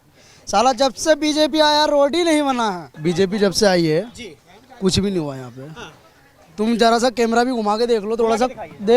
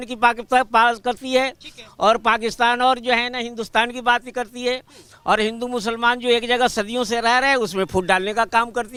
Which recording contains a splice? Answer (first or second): first